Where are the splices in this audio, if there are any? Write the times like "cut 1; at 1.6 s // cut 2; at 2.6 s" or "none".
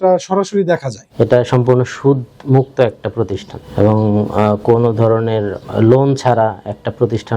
cut 1; at 1.1 s // cut 2; at 5.6 s